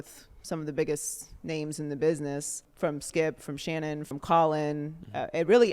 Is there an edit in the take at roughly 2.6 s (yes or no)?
yes